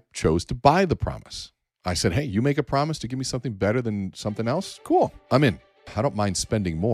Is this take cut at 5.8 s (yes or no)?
yes